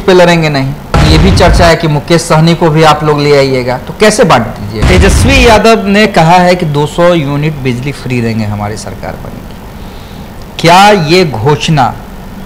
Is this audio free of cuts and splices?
no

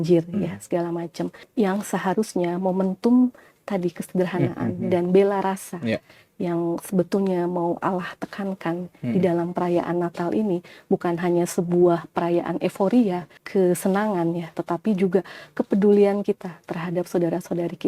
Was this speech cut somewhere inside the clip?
yes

